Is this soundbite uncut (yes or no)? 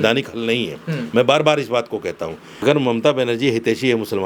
no